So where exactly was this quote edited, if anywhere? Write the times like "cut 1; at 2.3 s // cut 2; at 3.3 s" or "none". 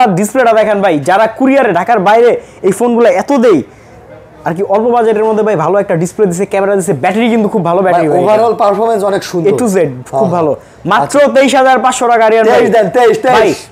none